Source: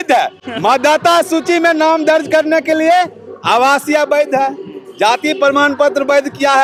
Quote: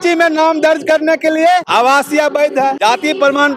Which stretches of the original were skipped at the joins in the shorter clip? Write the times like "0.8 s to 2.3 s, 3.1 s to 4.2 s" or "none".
3.1 s to 3.4 s, 4.5 s to 5.0 s

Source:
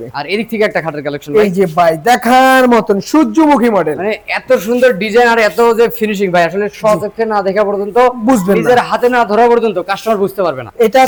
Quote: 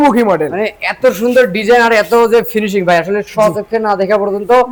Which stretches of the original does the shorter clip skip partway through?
none

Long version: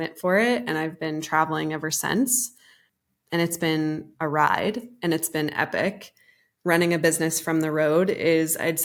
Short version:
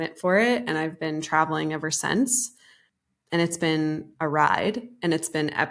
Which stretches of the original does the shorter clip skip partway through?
none

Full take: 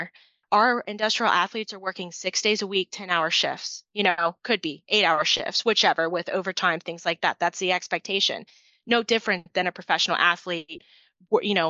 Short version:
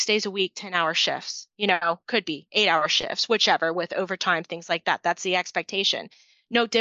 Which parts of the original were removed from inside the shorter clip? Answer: none

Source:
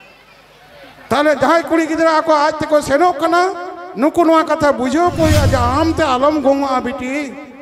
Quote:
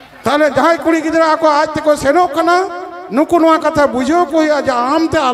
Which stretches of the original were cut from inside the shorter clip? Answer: none

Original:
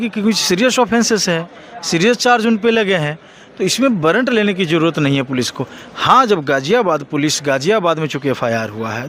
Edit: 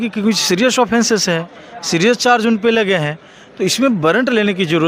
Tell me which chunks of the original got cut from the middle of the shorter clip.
none

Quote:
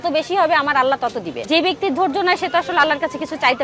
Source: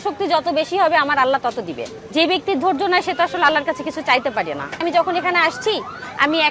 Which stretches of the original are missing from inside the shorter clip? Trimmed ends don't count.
1.8 s to 2.0 s

